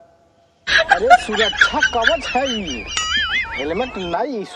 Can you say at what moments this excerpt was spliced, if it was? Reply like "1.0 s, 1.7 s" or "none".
none